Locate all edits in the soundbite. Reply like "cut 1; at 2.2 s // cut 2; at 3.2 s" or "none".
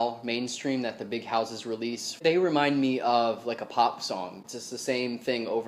cut 1; at 2.2 s // cut 2; at 4.4 s